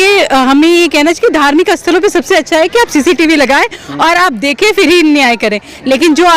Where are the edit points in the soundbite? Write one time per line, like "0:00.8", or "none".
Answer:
none